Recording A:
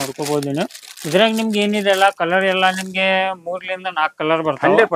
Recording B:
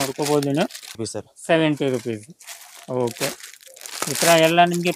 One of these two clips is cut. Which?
B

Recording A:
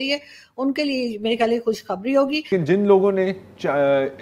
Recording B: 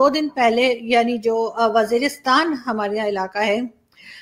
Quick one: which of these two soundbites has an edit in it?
A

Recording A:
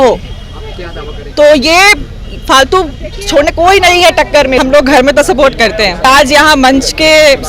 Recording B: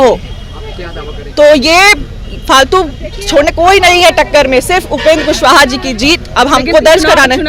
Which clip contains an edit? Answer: A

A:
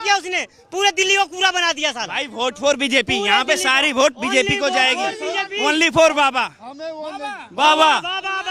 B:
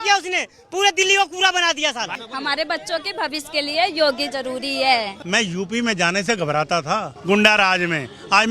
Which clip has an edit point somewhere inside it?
B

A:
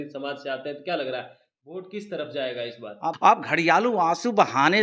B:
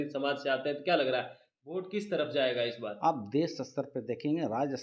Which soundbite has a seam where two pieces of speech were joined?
A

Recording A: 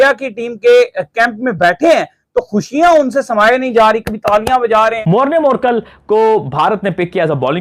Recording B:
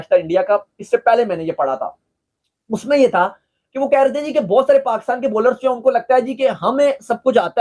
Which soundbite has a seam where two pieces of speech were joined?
A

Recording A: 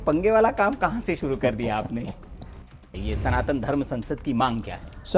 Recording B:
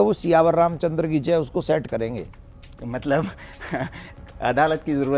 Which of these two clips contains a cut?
A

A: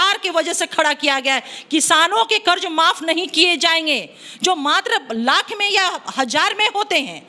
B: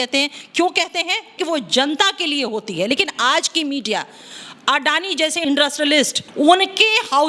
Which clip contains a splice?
B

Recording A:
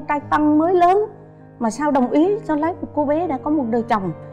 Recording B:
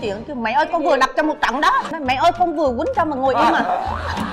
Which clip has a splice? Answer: B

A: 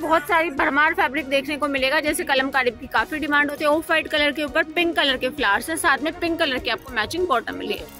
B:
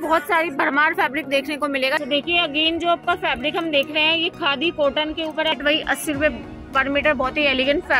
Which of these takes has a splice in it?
B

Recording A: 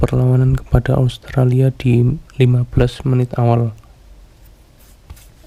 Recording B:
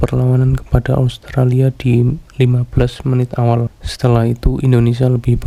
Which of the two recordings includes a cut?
B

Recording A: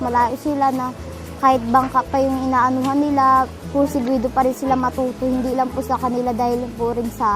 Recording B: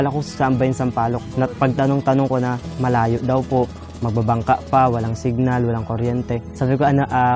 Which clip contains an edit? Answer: B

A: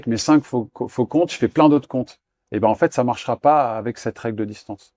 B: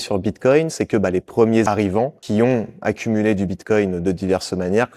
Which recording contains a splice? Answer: B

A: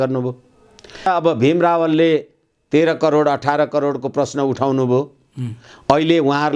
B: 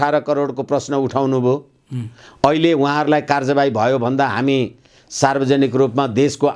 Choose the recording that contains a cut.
A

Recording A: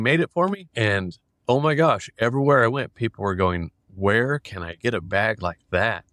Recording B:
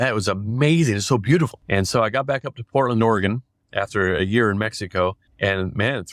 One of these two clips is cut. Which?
B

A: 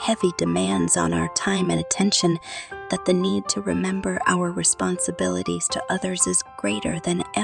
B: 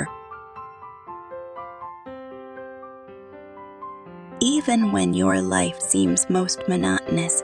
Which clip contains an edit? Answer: B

